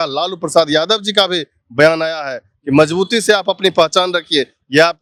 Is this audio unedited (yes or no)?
yes